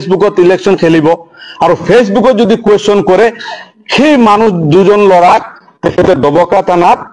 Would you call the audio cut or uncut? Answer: uncut